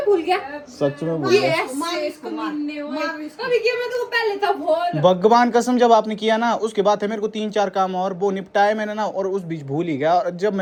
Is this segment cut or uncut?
uncut